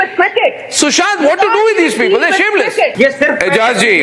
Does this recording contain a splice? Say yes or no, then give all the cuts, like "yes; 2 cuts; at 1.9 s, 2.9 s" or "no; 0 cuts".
yes; 1 cut; at 2.9 s